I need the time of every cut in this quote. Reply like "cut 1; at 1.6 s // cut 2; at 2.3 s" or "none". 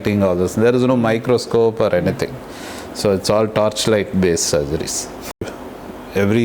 cut 1; at 5.5 s